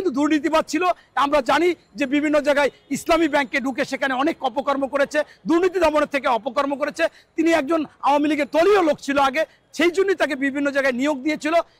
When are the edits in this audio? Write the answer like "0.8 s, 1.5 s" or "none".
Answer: none